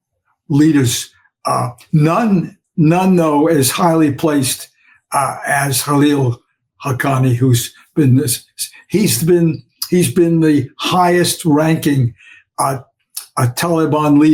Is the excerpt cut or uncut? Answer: uncut